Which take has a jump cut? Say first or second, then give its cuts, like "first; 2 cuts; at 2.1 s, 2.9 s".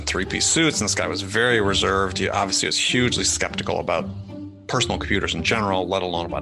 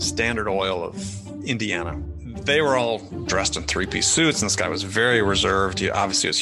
second; 1 cut; at 2.0 s